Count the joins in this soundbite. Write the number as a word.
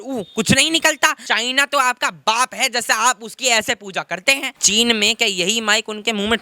two